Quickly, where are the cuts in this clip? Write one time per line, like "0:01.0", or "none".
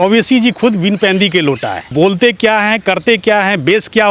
0:01.9